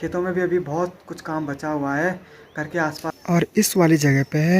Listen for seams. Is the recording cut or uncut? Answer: cut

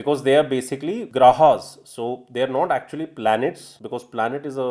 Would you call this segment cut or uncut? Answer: cut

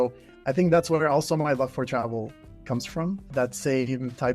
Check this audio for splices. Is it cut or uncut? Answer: cut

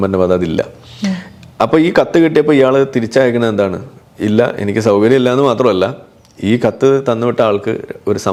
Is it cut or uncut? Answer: uncut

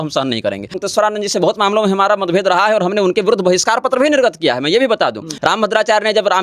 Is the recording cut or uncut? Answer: cut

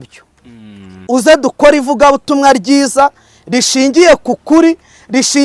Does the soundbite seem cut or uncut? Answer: uncut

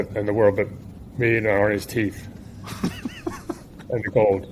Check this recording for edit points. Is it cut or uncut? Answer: uncut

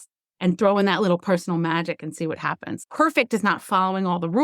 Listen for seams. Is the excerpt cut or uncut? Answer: cut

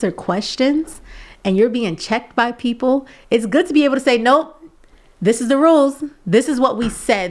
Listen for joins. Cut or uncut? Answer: uncut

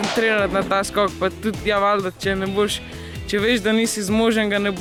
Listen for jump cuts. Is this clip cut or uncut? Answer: uncut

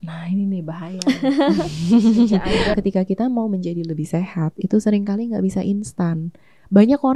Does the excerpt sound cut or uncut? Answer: cut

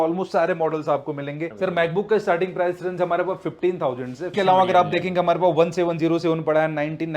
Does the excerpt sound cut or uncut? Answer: cut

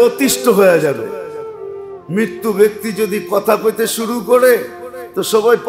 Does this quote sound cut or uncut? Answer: uncut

